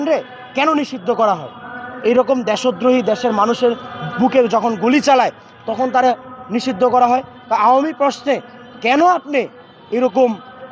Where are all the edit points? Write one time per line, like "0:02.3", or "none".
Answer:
none